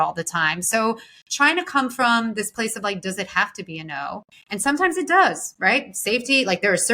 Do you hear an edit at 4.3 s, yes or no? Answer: yes